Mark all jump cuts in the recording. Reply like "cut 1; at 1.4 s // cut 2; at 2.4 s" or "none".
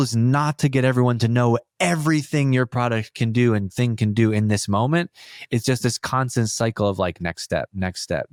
none